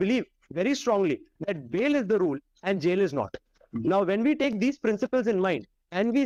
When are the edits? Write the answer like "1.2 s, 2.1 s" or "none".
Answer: none